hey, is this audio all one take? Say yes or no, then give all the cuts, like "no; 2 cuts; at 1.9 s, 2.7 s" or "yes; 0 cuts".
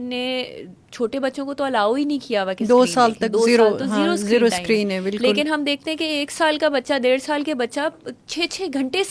yes; 0 cuts